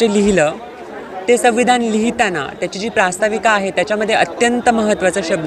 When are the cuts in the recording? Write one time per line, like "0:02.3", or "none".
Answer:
none